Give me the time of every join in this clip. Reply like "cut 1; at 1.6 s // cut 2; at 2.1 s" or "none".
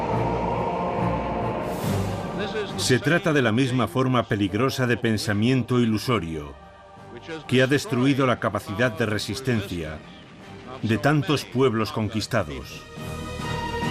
cut 1; at 3.0 s